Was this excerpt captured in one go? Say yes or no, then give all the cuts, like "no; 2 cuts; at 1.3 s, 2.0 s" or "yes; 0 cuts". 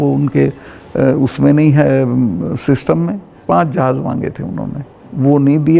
yes; 0 cuts